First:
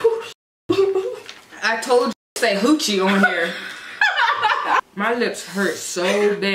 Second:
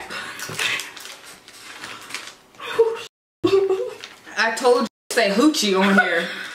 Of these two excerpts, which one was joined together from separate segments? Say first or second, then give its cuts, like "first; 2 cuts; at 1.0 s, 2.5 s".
first; 1 cut; at 4.8 s